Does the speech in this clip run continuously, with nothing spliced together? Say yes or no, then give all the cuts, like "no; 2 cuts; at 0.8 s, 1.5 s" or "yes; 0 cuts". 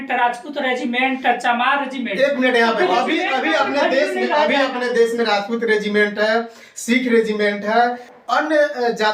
no; 1 cut; at 8.1 s